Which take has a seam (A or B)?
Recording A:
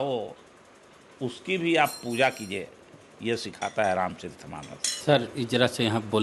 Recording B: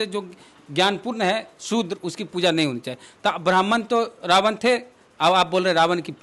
A